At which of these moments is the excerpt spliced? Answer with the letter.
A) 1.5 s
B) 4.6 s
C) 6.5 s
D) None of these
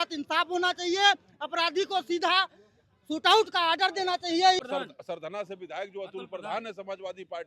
B